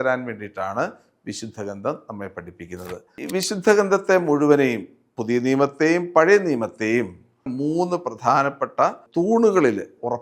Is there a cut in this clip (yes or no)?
yes